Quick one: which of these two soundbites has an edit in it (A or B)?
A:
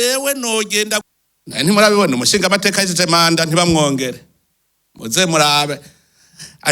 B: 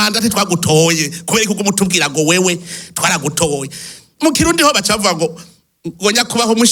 A